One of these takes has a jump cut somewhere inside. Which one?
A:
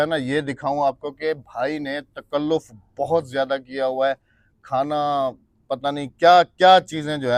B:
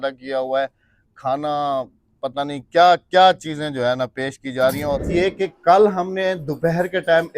B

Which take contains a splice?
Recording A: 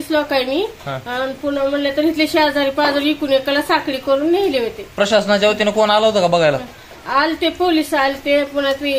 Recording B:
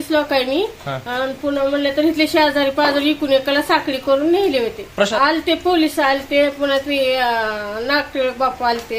B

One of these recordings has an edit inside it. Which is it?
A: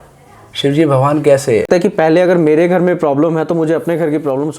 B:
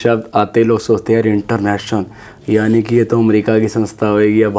A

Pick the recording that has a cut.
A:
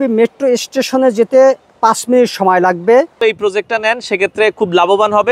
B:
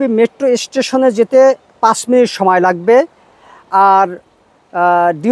A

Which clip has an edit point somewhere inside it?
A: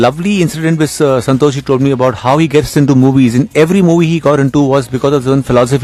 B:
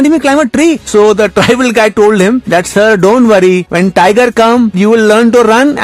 B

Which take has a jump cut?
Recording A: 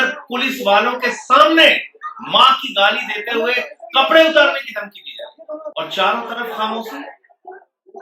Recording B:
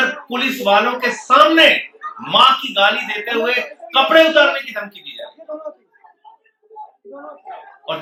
A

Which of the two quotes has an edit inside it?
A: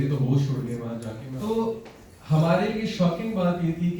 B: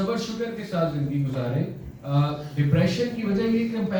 A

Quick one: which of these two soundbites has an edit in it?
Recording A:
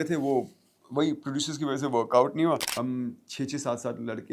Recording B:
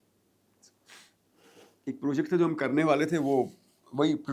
A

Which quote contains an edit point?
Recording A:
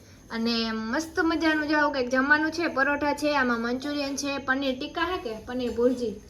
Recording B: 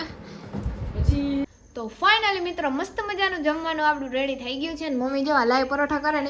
B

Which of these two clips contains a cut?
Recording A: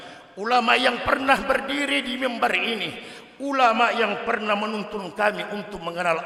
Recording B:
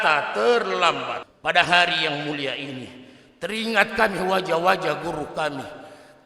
B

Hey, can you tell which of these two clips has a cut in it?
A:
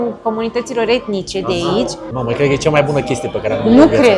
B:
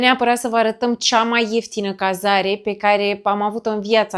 A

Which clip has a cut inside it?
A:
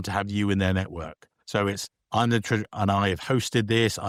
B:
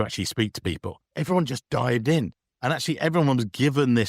B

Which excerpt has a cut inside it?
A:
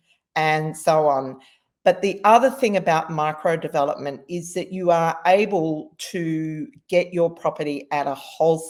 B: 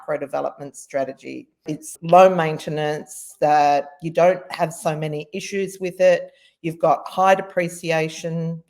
B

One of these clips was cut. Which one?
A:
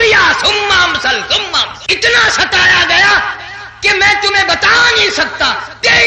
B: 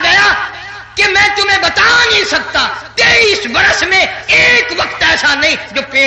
A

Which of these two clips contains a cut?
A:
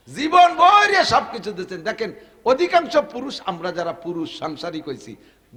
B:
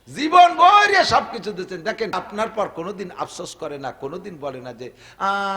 B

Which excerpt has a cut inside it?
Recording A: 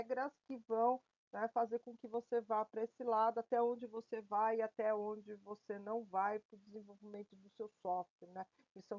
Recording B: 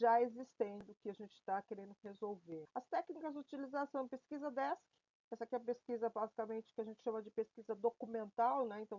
B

